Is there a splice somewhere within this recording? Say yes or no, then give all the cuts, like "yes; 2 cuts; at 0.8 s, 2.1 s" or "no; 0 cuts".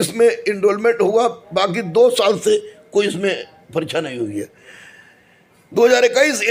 no; 0 cuts